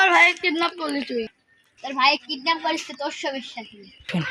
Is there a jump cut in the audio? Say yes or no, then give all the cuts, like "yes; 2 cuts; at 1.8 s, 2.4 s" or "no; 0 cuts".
no; 0 cuts